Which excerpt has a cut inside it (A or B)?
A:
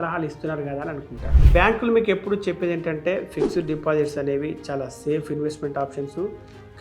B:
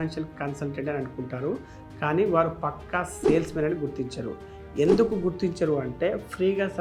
A